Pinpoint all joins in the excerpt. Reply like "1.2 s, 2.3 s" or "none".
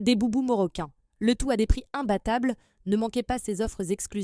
none

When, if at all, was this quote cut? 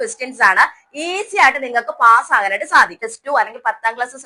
3.1 s

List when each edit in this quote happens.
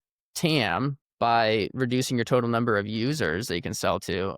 1.0 s

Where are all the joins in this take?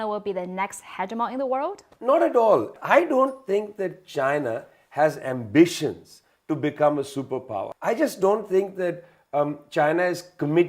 1.9 s, 2.7 s, 7.7 s

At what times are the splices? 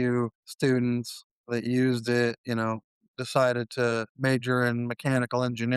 4.1 s

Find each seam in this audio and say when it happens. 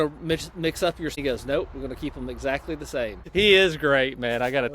1.1 s, 3.3 s

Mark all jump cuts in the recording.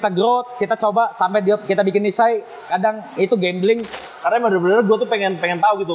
4.0 s

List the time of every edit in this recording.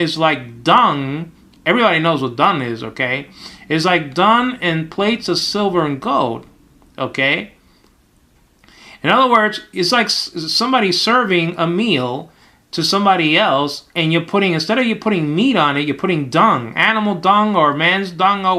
none

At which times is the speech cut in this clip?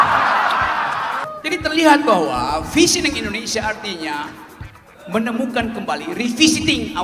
1.2 s

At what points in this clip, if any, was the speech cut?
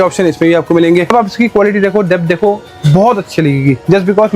1.1 s

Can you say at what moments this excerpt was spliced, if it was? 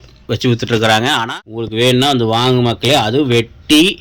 1.2 s

